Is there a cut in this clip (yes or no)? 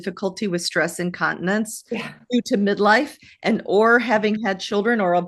no